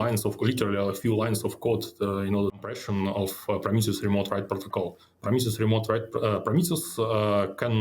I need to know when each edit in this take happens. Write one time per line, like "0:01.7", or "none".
0:02.8